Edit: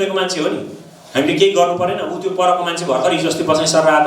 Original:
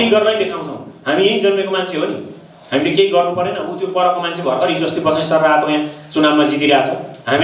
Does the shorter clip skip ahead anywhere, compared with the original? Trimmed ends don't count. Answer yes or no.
no